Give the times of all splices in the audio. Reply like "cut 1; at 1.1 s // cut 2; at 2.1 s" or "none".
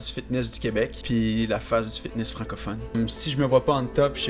cut 1; at 1.0 s // cut 2; at 2.9 s

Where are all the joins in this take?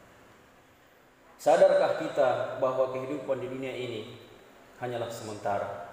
cut 1; at 1.0 s

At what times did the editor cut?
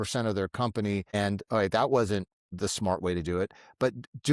cut 1; at 1.1 s // cut 2; at 2.4 s

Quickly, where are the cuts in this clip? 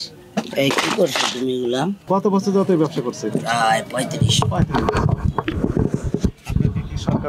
cut 1; at 2.0 s

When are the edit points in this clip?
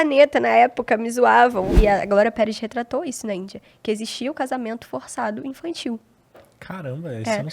cut 1; at 1.7 s

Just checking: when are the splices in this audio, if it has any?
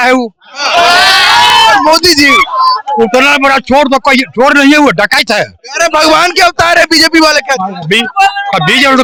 none

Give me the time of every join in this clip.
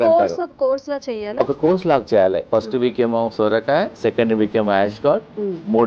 cut 1; at 2.4 s // cut 2; at 3.9 s

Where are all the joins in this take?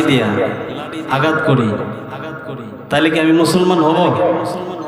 none

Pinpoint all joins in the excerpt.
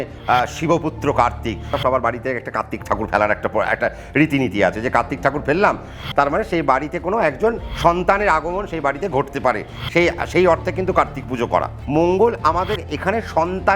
cut 1; at 1.7 s // cut 2; at 6.0 s // cut 3; at 7.7 s // cut 4; at 11.8 s

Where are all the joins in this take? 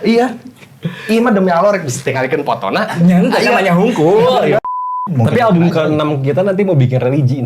cut 1; at 4.7 s

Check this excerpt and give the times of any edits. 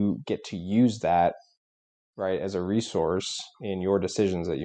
none

